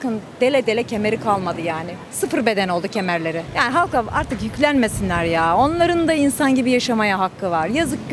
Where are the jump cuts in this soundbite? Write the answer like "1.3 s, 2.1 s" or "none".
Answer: 3.5 s